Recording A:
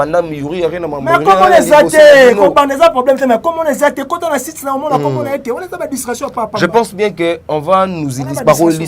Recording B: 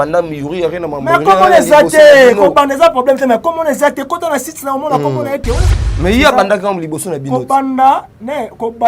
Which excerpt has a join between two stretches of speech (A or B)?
B